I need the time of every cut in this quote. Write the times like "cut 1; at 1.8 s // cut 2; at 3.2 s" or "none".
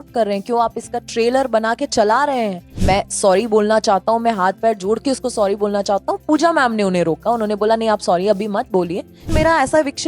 cut 1; at 2.7 s // cut 2; at 9.3 s